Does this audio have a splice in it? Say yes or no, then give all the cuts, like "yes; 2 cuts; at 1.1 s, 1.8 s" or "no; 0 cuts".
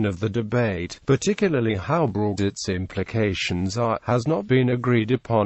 yes; 1 cut; at 1.4 s